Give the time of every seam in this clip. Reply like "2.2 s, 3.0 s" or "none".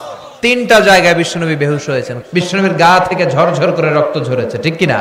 2.1 s